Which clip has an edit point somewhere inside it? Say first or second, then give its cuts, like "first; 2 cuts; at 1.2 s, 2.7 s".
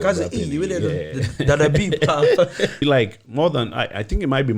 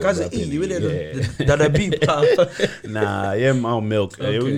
first; 1 cut; at 2.8 s